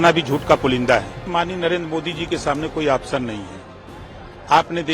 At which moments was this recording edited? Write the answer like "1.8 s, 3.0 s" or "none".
1.3 s